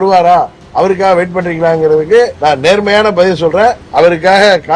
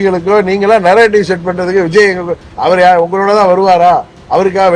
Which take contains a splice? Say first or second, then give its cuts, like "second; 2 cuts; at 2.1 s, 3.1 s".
first; 2 cuts; at 2.3 s, 3.8 s